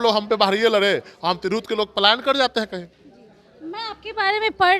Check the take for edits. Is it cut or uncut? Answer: uncut